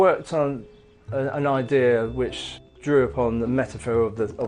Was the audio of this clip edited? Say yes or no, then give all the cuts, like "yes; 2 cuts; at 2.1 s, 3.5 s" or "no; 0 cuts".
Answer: no; 0 cuts